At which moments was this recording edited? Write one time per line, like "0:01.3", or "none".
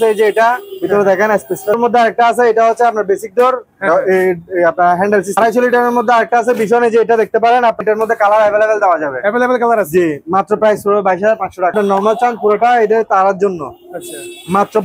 0:01.7
0:05.4
0:07.8
0:11.7